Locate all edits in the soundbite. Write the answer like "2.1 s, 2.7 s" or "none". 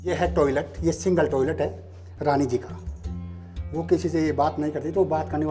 none